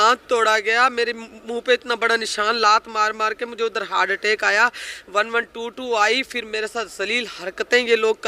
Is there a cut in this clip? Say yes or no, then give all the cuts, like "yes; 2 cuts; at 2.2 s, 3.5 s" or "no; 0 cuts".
no; 0 cuts